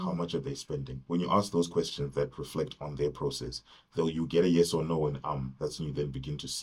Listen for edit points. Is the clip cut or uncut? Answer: uncut